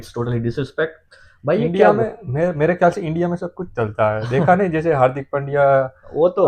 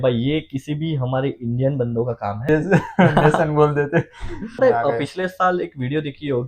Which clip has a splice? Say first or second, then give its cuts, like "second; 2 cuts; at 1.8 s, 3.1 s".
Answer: second; 2 cuts; at 2.4 s, 4.6 s